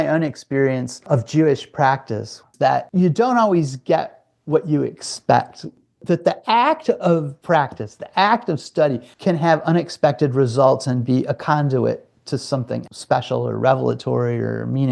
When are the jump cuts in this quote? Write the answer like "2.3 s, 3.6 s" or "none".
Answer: 7.3 s, 9.1 s